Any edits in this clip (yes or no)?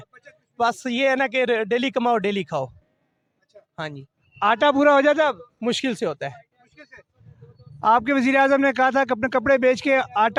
no